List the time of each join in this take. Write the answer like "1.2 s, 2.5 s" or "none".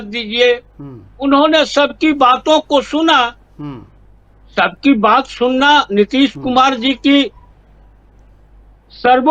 none